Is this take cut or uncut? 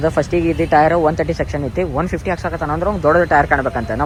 uncut